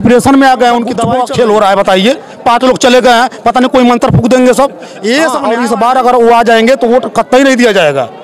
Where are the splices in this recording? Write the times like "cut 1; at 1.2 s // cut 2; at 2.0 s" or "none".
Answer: cut 1; at 1.0 s // cut 2; at 5.4 s